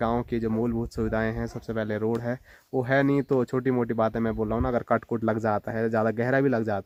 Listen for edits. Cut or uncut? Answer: uncut